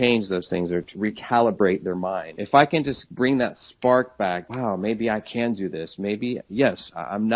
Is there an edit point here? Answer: yes; 4 cuts; at 0.9 s, 2.3 s, 3.0 s, 4.4 s

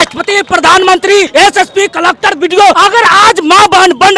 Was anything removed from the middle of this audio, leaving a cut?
yes; 2 cuts; at 1.3 s, 2.8 s

